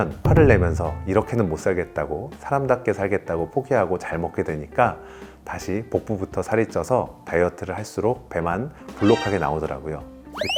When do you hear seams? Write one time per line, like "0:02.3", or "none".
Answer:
none

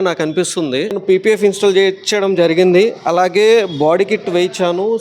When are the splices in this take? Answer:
0:01.0

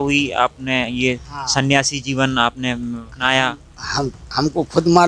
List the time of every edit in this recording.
0:03.1

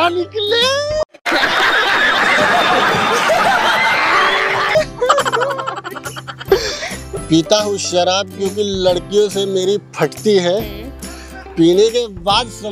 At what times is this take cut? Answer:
0:07.2

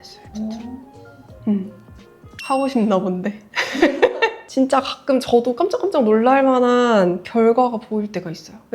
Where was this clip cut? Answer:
none

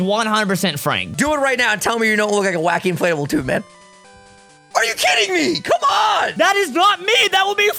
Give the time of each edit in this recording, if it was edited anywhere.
0:01.0
0:06.3

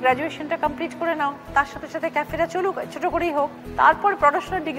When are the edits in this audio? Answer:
none

